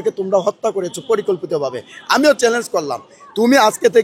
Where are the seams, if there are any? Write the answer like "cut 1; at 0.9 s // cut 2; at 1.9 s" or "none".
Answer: none